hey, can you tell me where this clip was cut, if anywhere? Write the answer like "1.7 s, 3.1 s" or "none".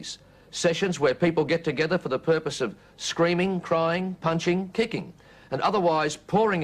1.3 s